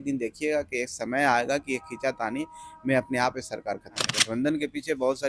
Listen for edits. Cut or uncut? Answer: cut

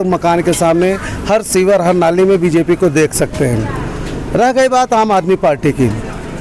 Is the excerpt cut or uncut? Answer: uncut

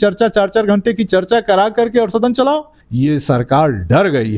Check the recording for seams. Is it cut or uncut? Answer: cut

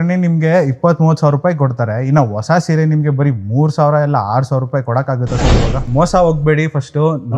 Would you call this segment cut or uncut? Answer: cut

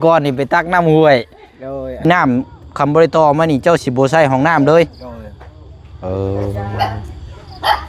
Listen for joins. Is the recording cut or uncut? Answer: cut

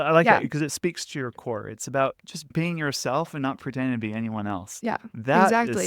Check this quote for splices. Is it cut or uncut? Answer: cut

